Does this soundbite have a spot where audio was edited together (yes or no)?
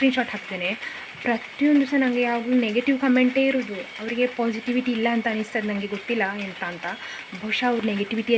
no